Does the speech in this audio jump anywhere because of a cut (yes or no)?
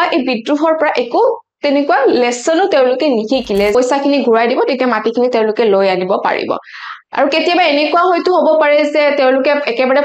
yes